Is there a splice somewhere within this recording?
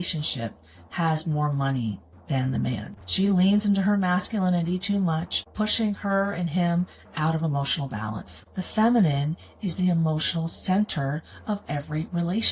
yes; 2 cuts; at 5.4 s, 8.4 s

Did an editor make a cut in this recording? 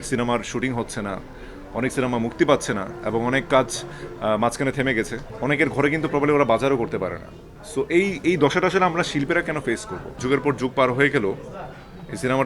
yes; 2 cuts; at 5.2 s, 10.1 s

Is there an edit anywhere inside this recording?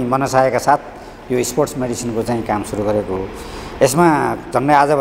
no; 0 cuts

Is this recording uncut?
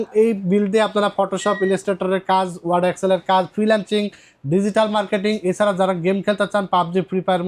yes; 0 cuts

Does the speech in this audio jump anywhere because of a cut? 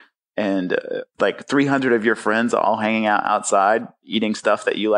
yes; 1 cut; at 1.1 s

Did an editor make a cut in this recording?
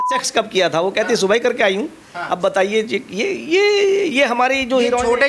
no; 0 cuts

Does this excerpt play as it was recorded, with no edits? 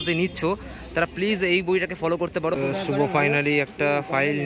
no; 1 cut; at 2.6 s

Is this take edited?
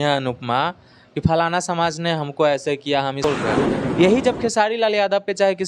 yes; 1 cut; at 3.2 s

